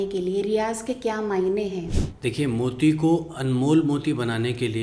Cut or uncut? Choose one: cut